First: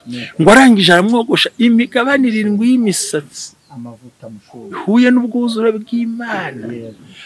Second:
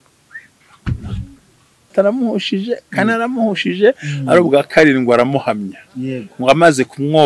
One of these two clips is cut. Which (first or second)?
second